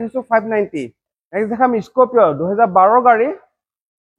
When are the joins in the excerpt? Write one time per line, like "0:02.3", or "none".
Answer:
0:01.0